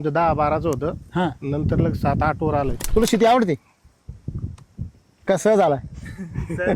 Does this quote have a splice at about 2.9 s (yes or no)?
yes